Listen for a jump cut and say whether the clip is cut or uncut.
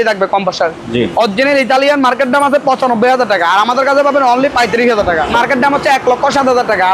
cut